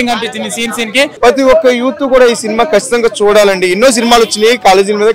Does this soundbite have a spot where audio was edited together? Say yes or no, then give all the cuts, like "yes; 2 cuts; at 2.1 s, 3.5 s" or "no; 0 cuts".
yes; 1 cut; at 1.1 s